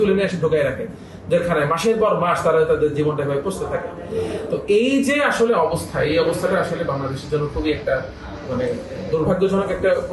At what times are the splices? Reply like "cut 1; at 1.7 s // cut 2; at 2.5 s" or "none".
none